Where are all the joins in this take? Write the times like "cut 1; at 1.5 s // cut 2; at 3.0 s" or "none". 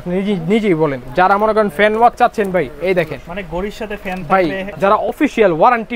cut 1; at 1.0 s // cut 2; at 4.6 s